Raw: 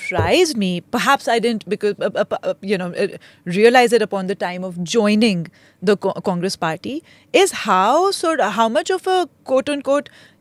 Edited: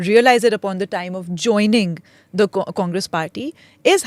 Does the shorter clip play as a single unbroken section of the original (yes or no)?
yes